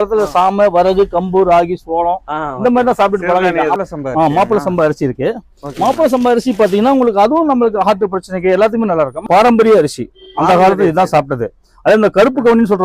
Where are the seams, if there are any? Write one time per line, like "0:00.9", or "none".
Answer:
0:03.8
0:09.2